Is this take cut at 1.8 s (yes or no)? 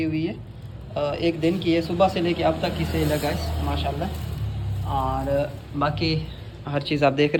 no